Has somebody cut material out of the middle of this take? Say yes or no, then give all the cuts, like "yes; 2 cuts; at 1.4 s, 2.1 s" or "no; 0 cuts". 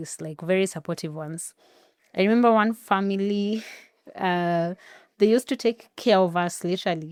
no; 0 cuts